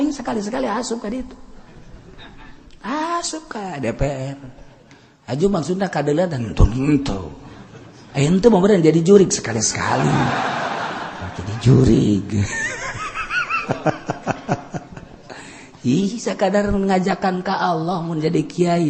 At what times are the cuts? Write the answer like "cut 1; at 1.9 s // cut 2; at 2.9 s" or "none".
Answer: none